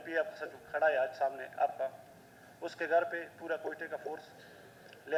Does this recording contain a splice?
no; 0 cuts

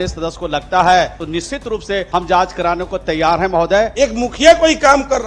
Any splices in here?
yes; 2 cuts; at 1.8 s, 3.9 s

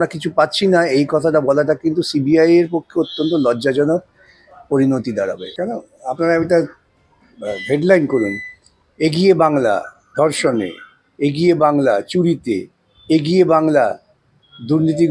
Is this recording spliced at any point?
yes; 1 cut; at 5.5 s

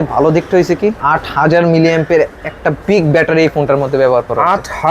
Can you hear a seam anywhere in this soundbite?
yes; 1 cut; at 1.0 s

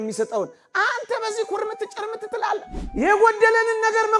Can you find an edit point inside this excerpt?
yes; 1 cut; at 2.8 s

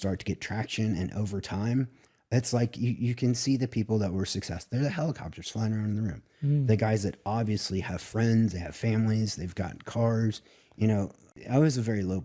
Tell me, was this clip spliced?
yes; 1 cut; at 11.3 s

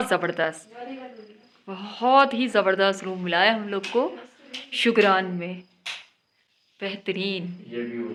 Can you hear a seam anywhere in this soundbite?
no; 0 cuts

